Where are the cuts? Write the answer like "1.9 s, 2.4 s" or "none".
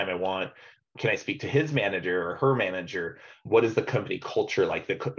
0.9 s, 3.3 s